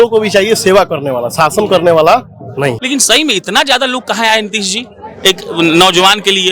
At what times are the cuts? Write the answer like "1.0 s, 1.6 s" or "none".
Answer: 2.8 s